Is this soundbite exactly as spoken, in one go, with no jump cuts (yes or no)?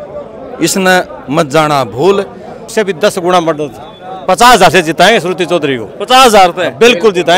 no